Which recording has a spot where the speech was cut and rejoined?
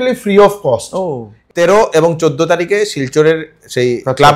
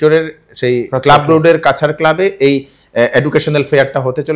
first; 1 cut; at 1.4 s

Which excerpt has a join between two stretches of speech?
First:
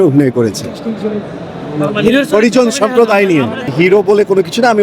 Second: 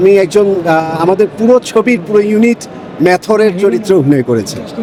first; 1 cut; at 3.7 s

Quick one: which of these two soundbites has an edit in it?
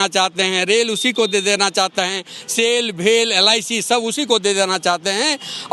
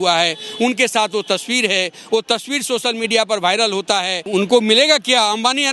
second; 1 cut; at 4.2 s

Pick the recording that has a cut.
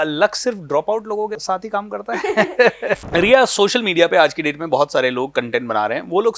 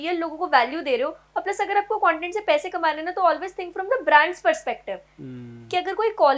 first; 2 cuts; at 1.4 s, 3.0 s

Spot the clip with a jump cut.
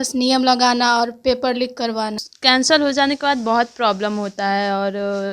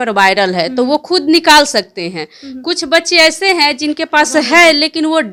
first; 1 cut; at 2.2 s

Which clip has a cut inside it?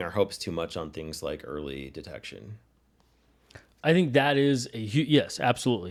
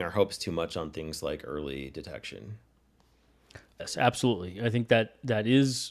second; 1 cut; at 3.8 s

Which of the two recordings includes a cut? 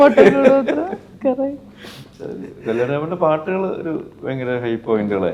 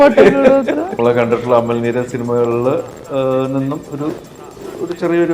second; 1 cut; at 1.0 s

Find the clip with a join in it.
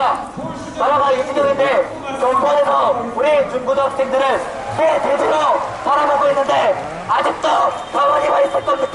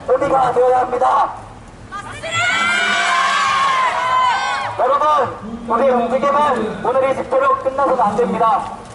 first; 1 cut; at 3.4 s

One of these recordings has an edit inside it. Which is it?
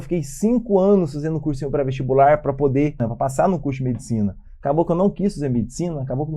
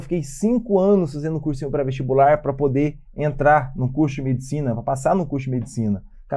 first; 1 cut; at 3.0 s

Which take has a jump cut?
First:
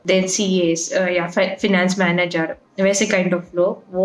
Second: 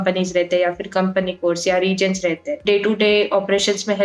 second; 1 cut; at 2.6 s

